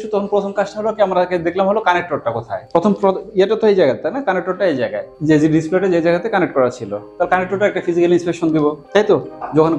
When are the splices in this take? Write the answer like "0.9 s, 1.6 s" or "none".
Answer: none